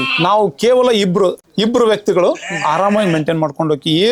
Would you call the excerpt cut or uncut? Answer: uncut